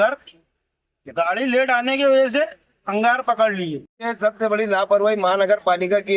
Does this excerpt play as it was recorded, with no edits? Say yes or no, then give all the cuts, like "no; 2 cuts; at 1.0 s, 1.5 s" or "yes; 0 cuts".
no; 1 cut; at 4.0 s